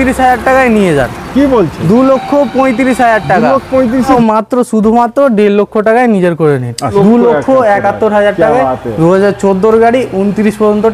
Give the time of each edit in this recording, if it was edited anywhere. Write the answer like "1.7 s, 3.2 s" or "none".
4.1 s, 6.9 s